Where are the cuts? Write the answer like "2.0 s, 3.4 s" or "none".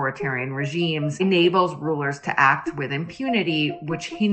1.2 s